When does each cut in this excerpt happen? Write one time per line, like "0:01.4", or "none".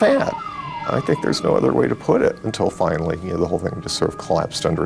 0:02.5